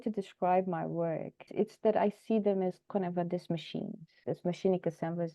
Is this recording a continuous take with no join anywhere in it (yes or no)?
no